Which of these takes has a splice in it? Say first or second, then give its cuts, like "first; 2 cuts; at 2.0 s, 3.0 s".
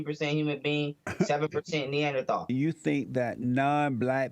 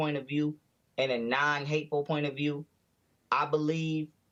first; 1 cut; at 2.5 s